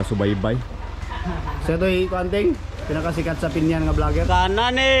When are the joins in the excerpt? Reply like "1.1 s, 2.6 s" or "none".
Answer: none